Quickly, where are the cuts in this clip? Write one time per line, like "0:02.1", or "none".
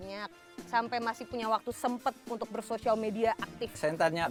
none